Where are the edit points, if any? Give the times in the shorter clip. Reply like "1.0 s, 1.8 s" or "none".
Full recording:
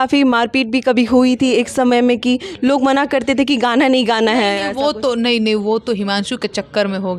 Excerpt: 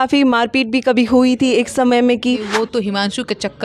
2.5 s